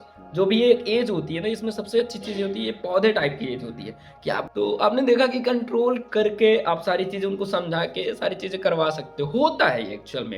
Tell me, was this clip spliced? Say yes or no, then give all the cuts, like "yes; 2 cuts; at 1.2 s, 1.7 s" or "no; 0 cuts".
yes; 1 cut; at 4.4 s